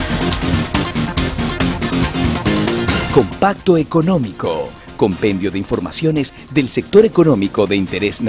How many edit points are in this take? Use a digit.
1